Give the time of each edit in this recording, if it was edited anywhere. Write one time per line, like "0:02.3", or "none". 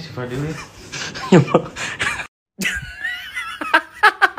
0:02.4